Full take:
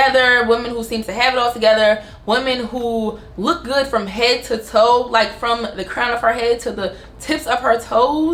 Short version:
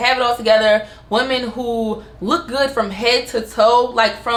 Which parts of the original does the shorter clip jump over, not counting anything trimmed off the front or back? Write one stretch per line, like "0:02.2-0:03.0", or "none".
none